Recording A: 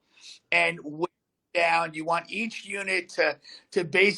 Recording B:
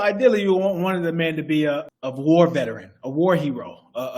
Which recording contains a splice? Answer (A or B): B